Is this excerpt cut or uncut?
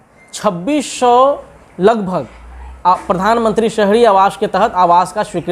uncut